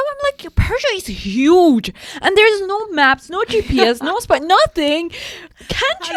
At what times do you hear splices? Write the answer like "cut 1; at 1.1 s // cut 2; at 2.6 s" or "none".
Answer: none